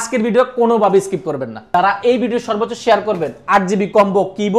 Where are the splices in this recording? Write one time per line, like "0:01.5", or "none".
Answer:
0:01.6